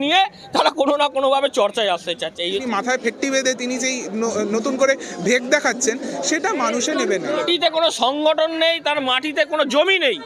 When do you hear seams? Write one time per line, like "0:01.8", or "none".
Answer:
0:02.4
0:07.5